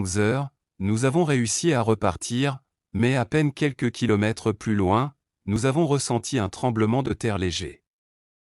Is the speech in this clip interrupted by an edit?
yes; 1 cut; at 5.7 s

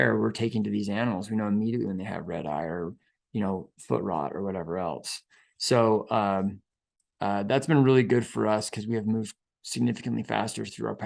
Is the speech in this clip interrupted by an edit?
no; 0 cuts

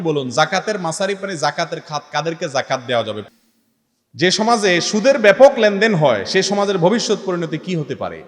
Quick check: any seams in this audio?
yes; 1 cut; at 3.2 s

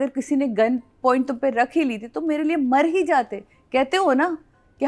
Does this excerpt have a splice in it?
no; 0 cuts

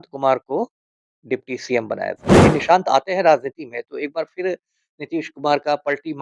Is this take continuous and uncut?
no; 1 cut; at 2.4 s

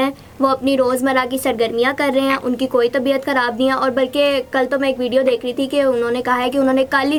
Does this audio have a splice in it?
no; 0 cuts

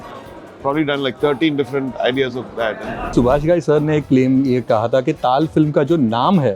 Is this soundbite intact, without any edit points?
no; 1 cut; at 3.1 s

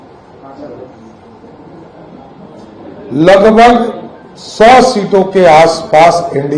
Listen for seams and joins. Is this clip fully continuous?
yes; 0 cuts

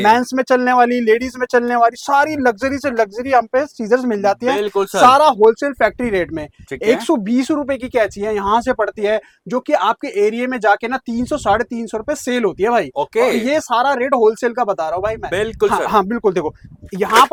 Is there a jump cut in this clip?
no; 0 cuts

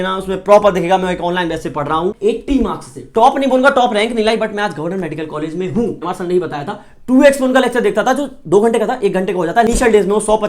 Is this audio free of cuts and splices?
no; 3 cuts; at 2.2 s, 6.0 s, 9.7 s

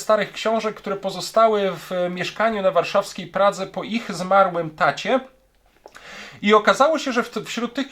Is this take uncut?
yes; 0 cuts

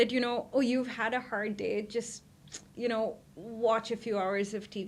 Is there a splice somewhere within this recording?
no; 0 cuts

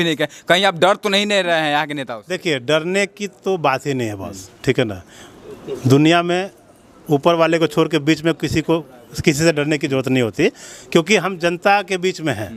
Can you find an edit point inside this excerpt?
no; 0 cuts

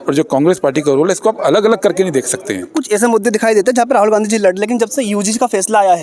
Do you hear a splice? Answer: yes; 1 cut; at 2.7 s

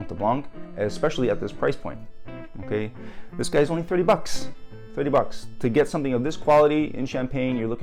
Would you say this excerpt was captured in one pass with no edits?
yes; 0 cuts

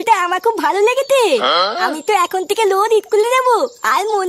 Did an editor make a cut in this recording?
no; 0 cuts

